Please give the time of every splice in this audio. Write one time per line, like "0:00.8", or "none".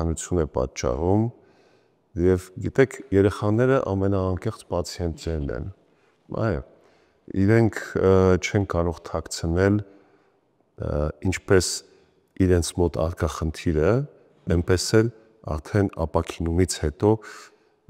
none